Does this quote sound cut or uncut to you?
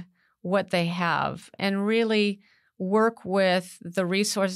cut